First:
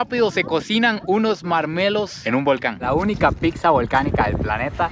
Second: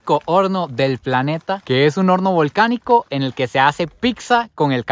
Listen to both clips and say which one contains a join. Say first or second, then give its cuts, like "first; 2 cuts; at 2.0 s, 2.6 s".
first; 1 cut; at 2.8 s